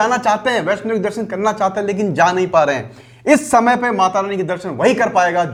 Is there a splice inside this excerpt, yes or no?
no